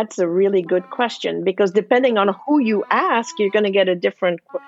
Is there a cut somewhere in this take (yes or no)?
no